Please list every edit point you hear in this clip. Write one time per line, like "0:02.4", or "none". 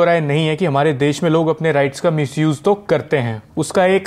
none